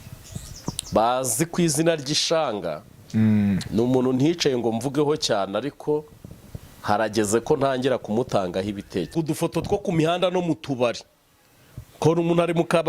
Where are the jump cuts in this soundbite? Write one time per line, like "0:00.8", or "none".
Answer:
0:09.1